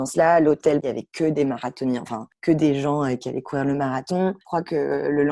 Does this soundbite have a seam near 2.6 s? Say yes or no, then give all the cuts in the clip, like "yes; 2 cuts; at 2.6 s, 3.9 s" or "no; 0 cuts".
no; 2 cuts; at 0.8 s, 4.4 s